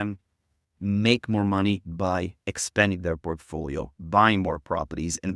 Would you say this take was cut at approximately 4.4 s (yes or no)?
no